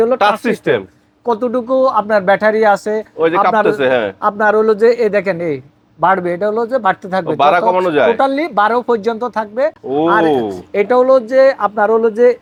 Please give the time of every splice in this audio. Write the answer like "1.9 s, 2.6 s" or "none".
none